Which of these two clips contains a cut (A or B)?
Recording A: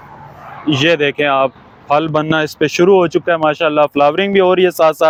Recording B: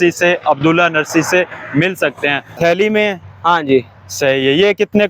B